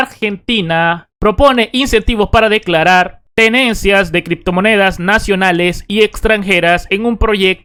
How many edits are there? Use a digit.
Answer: 0